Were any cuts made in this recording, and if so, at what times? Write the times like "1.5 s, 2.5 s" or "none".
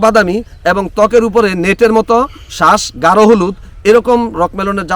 none